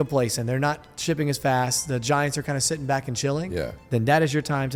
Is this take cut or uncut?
uncut